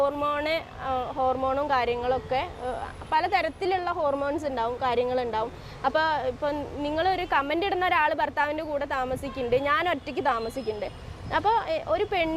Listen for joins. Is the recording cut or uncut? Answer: uncut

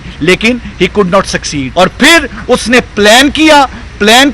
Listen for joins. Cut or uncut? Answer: cut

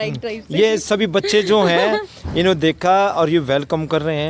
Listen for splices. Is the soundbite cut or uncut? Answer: uncut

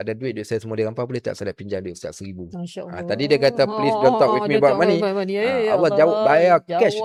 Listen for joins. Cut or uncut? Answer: uncut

